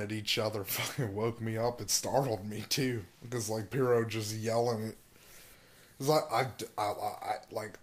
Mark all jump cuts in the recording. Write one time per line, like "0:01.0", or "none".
0:06.0

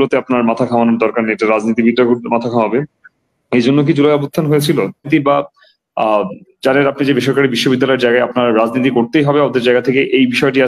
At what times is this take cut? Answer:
0:05.1

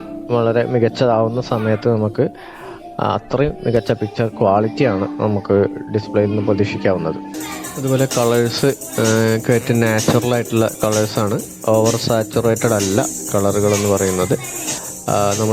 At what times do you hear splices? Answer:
none

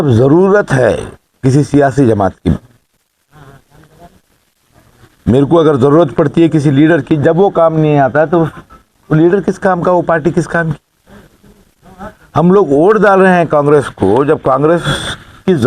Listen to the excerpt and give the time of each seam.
none

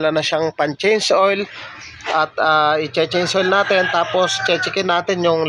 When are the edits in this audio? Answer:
none

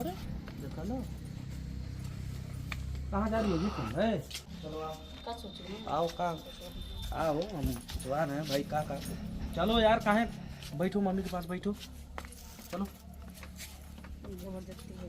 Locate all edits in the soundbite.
0:04.4

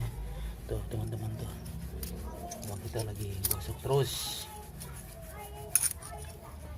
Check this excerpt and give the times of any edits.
none

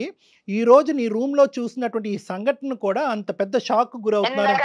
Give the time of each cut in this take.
none

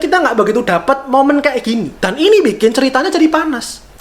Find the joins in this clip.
0:01.9

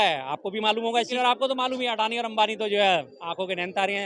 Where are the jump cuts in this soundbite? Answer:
0:01.1

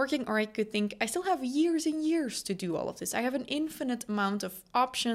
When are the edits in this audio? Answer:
none

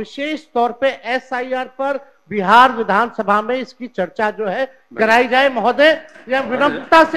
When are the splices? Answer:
none

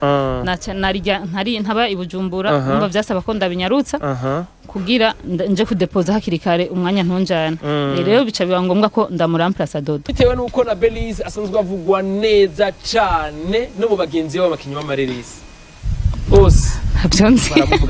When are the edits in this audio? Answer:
0:10.1

